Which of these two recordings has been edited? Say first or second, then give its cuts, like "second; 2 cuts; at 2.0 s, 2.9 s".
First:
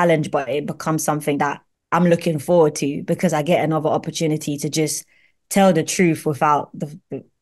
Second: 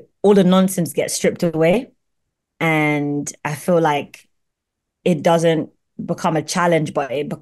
first; 1 cut; at 1.7 s